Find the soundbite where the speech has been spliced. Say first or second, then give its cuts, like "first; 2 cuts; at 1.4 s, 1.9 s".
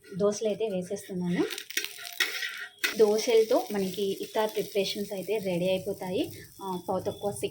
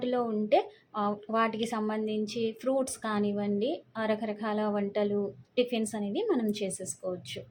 first; 1 cut; at 2.8 s